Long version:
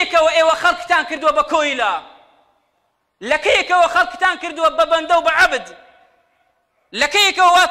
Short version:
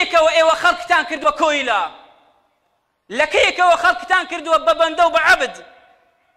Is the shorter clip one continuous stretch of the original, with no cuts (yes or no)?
no